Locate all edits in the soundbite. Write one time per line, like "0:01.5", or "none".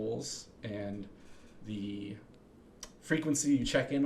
none